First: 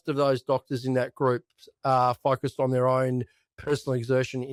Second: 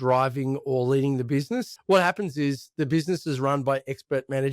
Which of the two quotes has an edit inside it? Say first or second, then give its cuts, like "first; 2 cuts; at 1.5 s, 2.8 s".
second; 1 cut; at 1.7 s